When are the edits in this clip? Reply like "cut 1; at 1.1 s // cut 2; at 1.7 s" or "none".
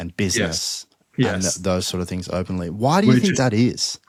none